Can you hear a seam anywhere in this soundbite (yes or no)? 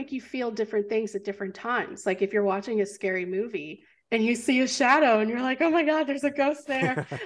no